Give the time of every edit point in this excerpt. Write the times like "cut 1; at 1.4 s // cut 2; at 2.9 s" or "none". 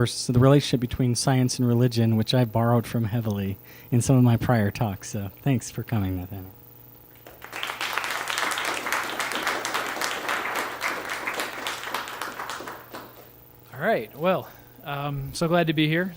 cut 1; at 4.3 s